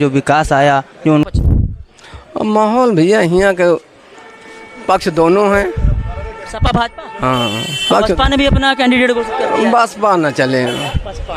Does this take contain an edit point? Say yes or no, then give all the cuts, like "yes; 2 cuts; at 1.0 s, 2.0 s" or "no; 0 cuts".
yes; 1 cut; at 1.3 s